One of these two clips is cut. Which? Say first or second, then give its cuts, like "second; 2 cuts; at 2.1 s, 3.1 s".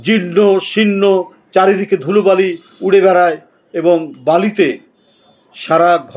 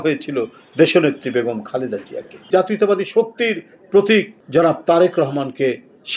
second; 2 cuts; at 2.5 s, 4.4 s